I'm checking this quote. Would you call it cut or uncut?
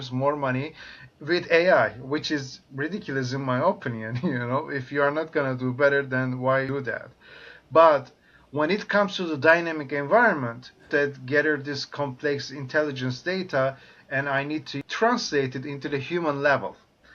cut